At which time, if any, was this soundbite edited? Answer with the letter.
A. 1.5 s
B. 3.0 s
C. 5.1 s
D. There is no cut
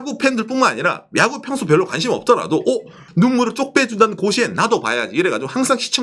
B